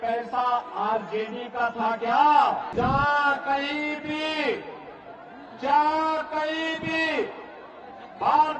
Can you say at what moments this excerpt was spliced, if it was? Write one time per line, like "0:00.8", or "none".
0:02.7